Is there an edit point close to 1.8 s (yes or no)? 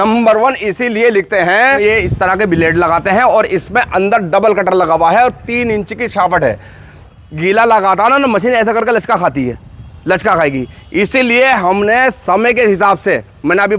yes